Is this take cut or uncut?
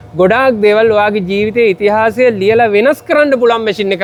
uncut